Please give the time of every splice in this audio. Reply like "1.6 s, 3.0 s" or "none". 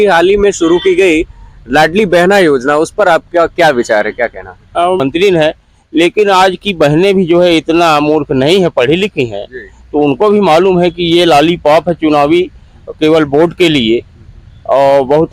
5.0 s